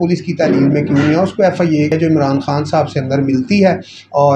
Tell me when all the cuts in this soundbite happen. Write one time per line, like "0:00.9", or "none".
0:01.9